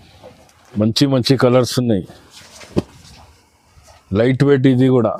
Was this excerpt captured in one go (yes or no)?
yes